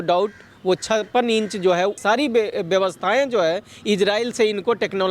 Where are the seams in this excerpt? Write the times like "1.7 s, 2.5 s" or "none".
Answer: 2.0 s